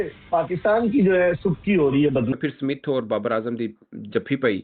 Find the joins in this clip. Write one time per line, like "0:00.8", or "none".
0:02.3

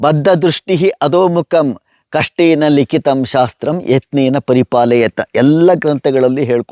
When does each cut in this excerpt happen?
none

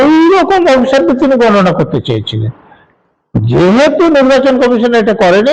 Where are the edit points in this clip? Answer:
none

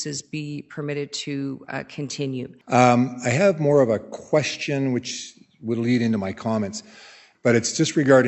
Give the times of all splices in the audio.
0:02.5
0:07.2

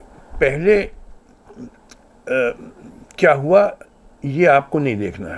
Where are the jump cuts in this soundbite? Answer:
none

